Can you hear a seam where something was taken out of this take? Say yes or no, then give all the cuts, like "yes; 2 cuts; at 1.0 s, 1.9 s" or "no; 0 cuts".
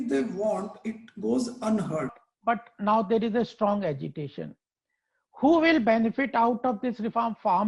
yes; 1 cut; at 2.2 s